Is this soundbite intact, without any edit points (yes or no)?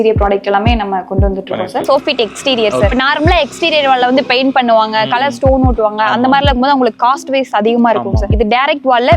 no